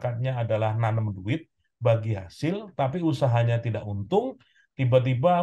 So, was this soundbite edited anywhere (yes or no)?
no